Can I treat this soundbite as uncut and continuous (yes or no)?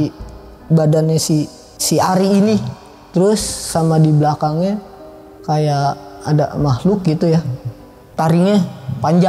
yes